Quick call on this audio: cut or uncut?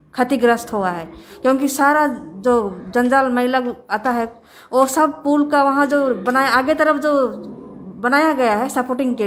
uncut